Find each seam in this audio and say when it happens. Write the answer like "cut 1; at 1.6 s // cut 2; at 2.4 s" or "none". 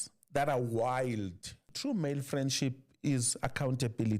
cut 1; at 1.7 s